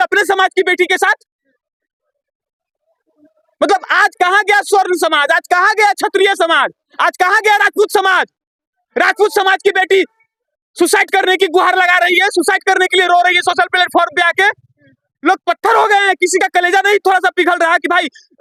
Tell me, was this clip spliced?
no; 0 cuts

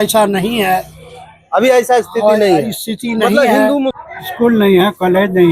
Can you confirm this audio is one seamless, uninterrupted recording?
no; 1 cut; at 4.0 s

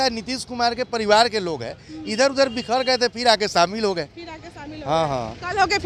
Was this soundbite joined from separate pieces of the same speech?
no; 0 cuts

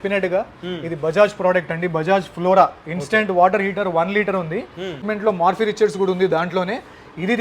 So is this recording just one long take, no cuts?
no; 1 cut; at 5.0 s

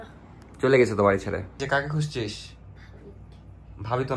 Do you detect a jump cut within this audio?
yes; 1 cut; at 1.6 s

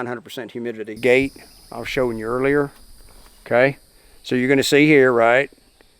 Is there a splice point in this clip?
yes; 1 cut; at 1.0 s

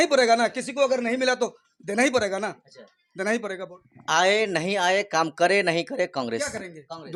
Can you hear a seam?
no; 0 cuts

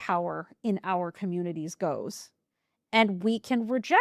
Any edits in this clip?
no; 0 cuts

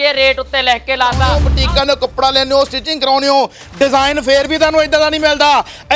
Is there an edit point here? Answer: yes; 1 cut; at 1.4 s

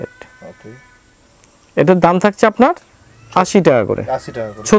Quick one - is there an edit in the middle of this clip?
no; 0 cuts

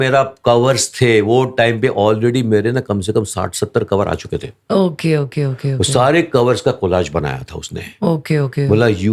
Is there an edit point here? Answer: no; 0 cuts

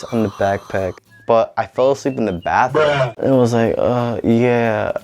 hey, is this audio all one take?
no; 2 cuts; at 1.1 s, 3.1 s

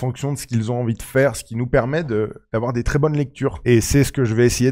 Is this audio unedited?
yes; 0 cuts

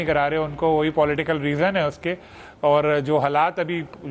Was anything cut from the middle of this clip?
no; 0 cuts

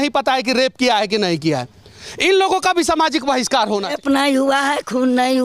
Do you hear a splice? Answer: yes; 1 cut; at 3.9 s

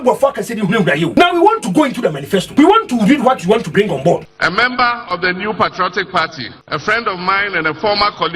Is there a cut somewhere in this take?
yes; 4 cuts; at 1.1 s, 2.5 s, 4.4 s, 6.5 s

